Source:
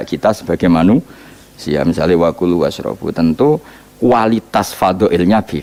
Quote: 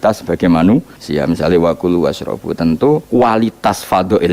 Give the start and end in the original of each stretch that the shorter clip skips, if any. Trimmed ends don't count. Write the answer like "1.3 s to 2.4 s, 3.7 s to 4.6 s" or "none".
1.2 s to 1.6 s, 3.6 s to 3.9 s